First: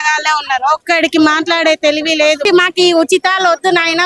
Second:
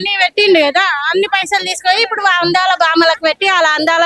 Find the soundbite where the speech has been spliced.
first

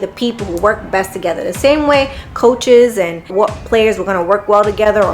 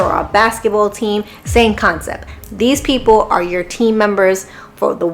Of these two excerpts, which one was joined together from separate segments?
first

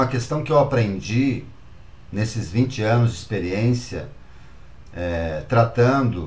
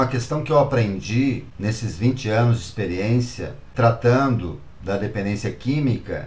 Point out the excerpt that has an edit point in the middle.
second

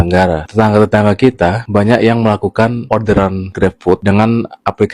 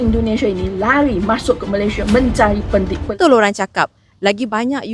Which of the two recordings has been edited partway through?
second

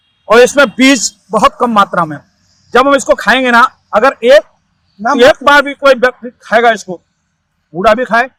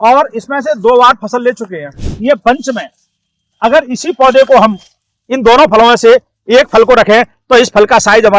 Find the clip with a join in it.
second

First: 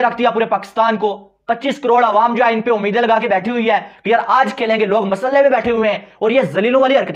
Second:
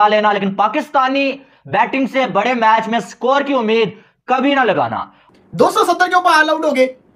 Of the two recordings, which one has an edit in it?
second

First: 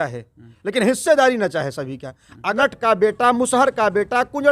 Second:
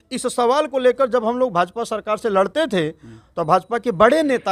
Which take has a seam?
first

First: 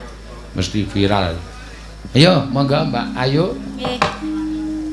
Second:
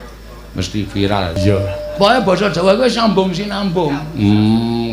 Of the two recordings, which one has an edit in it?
second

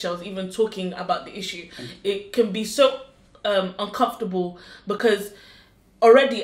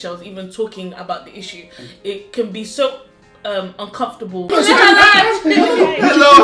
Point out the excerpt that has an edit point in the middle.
second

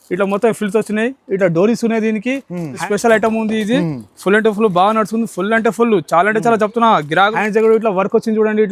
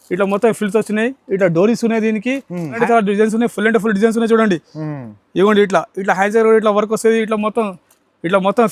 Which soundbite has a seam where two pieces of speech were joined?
second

